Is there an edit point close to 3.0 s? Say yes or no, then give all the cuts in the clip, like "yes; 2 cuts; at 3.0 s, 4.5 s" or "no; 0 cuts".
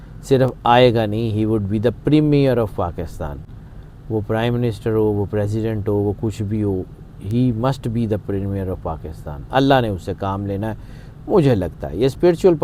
no; 0 cuts